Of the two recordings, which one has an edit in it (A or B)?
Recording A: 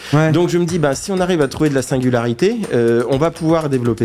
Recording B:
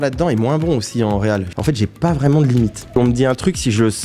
B